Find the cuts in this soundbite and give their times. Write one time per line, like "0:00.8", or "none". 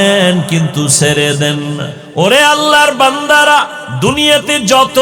0:02.0
0:03.8